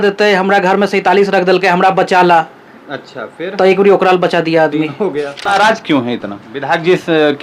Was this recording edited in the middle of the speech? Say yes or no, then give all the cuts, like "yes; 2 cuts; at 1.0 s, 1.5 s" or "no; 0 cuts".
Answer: yes; 1 cut; at 5.5 s